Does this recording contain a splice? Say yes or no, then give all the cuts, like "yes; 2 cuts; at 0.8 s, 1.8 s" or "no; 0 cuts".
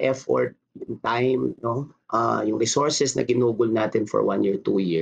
no; 0 cuts